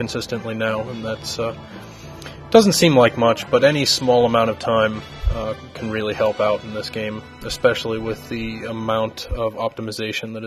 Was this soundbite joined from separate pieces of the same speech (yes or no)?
yes